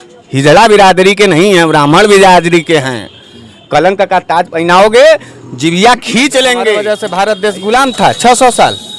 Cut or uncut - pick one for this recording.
cut